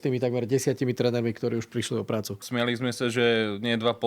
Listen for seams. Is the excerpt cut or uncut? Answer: cut